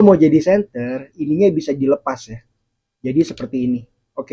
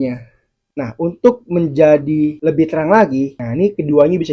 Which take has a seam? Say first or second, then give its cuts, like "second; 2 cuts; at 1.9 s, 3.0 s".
second; 2 cuts; at 2.4 s, 3.4 s